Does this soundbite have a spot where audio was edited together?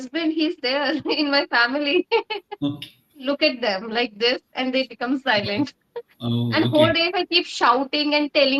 yes; 1 cut; at 3.2 s

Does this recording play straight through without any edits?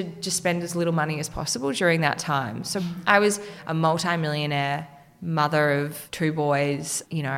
no; 3 cuts; at 2.8 s, 3.5 s, 6.0 s

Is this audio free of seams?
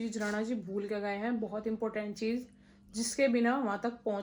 yes; 0 cuts

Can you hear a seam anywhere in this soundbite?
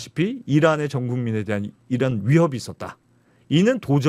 no; 0 cuts

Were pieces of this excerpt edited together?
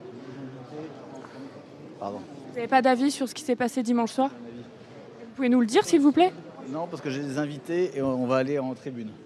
no; 0 cuts

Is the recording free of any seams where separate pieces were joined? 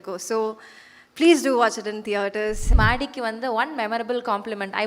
no; 1 cut; at 2.7 s

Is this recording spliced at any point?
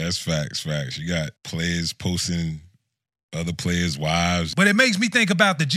yes; 2 cuts; at 1.4 s, 4.5 s

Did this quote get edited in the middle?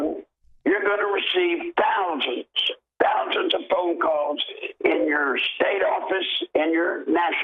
no; 0 cuts

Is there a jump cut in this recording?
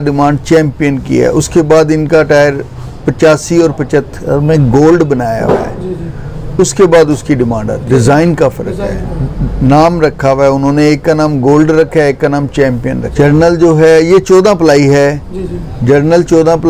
no; 0 cuts

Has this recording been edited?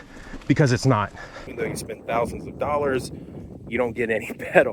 yes; 1 cut; at 1.5 s

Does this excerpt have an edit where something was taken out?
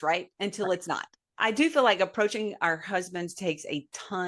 yes; 1 cut; at 1.2 s

